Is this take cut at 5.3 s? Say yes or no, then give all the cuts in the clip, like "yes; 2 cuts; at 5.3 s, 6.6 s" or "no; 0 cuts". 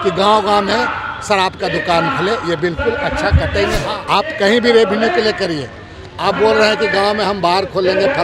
no; 1 cut; at 3.9 s